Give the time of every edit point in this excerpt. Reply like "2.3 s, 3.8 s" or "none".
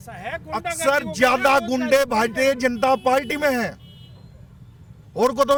none